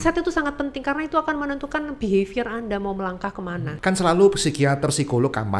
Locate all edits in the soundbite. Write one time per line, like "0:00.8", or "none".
0:03.7